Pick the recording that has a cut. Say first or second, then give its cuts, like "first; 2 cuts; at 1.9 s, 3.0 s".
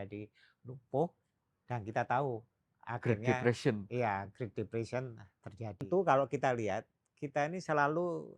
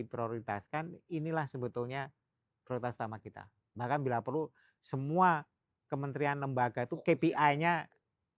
first; 1 cut; at 5.8 s